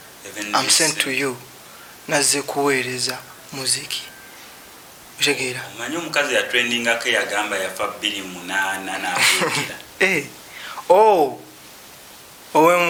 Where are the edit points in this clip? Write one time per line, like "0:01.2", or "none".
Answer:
none